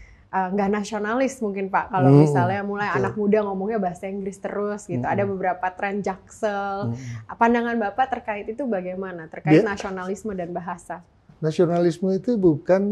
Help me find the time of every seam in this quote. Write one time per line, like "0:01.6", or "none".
none

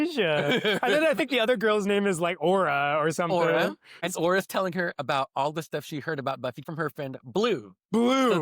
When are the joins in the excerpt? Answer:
0:04.1
0:05.0
0:06.6

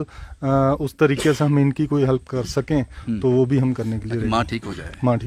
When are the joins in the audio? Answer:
none

